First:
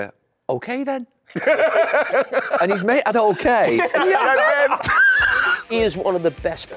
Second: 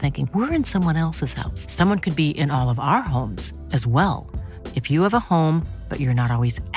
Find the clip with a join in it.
first; 1 cut; at 5.7 s

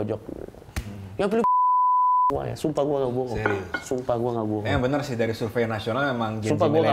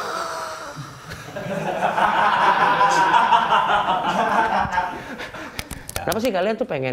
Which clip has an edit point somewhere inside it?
second; 1 cut; at 6.0 s

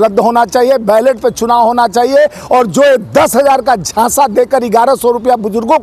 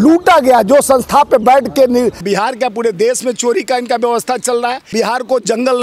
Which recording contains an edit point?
second; 2 cuts; at 2.2 s, 4.9 s

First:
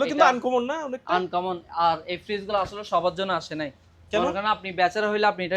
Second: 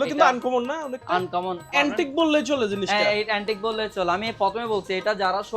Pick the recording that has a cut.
second; 1 cut; at 1.7 s

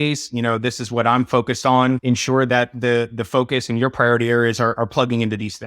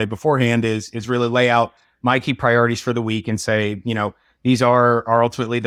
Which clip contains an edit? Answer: first; 1 cut; at 2.3 s

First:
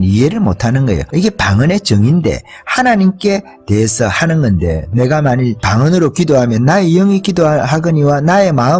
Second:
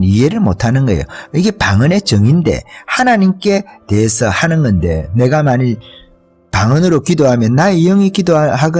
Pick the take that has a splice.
first; 2 cuts; at 1.0 s, 5.6 s

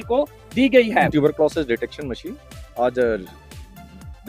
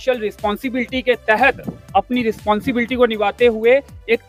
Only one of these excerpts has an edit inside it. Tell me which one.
first; 1 cut; at 1.1 s

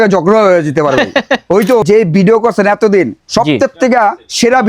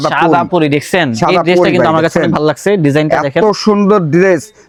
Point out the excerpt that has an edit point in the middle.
first; 1 cut; at 1.8 s

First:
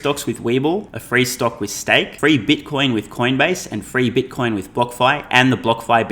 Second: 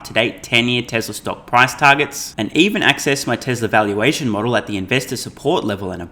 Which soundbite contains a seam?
first; 2 cuts; at 1.0 s, 2.1 s

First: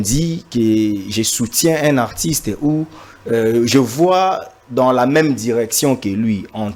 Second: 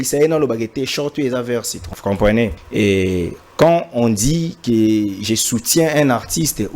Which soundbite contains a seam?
second; 2 cuts; at 1.8 s, 2.6 s

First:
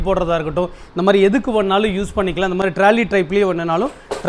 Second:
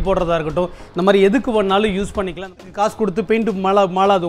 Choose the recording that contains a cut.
second; 1 cut; at 2.6 s

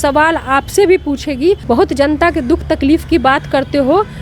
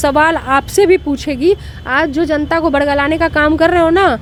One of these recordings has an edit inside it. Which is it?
first; 1 cut; at 1.6 s

